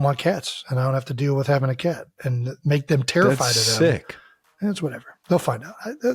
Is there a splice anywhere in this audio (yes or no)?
no